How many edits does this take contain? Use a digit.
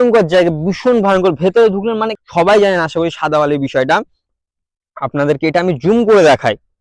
1